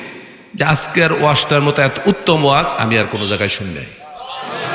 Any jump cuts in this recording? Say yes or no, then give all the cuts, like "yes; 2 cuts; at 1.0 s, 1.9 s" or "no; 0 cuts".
no; 0 cuts